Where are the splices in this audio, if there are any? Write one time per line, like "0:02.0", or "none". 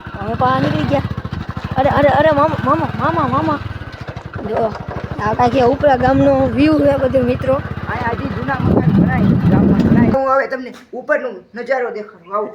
0:10.1